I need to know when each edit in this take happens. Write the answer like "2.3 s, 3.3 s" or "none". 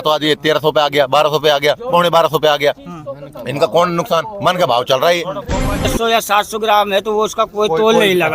5.9 s